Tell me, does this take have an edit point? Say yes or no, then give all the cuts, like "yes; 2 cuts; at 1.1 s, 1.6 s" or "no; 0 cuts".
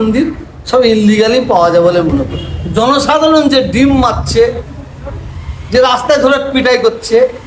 yes; 1 cut; at 2.4 s